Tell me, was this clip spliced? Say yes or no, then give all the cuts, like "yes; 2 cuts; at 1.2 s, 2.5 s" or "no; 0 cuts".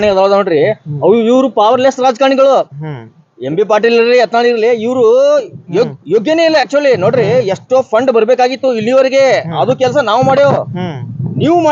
no; 0 cuts